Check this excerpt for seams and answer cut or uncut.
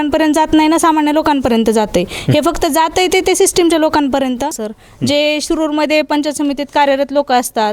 cut